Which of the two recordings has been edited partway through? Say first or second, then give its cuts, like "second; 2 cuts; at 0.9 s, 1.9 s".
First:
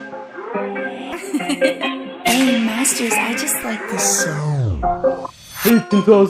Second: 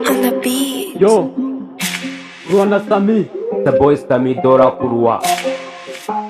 second; 1 cut; at 5.4 s